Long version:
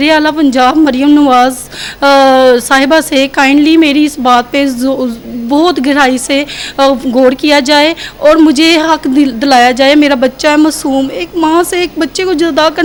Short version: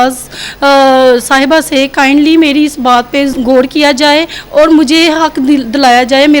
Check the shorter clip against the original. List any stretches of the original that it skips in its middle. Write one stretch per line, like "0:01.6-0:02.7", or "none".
0:04.8-0:07.0